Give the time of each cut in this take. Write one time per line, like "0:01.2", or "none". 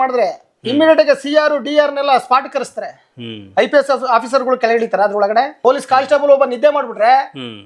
0:05.5